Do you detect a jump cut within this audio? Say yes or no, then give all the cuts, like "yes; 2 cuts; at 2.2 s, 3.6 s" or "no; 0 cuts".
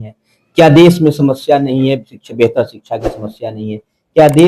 no; 0 cuts